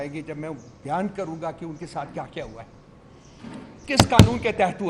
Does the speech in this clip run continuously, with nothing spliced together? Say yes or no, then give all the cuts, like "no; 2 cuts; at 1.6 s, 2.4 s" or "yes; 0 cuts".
yes; 0 cuts